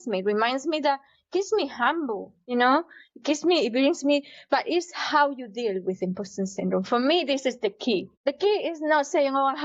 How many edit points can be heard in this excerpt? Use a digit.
2